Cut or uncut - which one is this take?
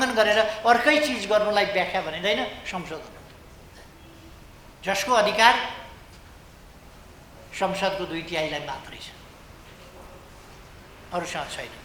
uncut